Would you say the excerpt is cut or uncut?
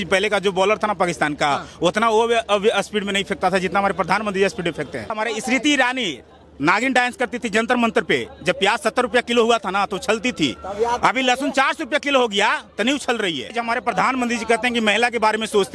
cut